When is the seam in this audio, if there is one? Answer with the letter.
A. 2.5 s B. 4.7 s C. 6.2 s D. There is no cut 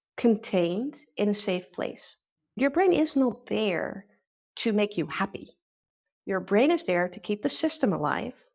A